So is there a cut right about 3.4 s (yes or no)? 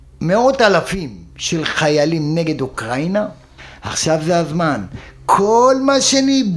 yes